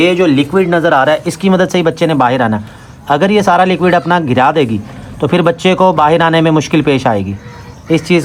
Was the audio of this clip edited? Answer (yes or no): no